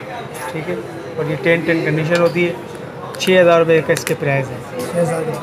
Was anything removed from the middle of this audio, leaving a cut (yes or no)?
no